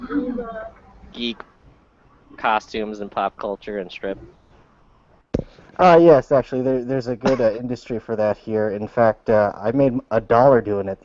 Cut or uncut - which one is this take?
cut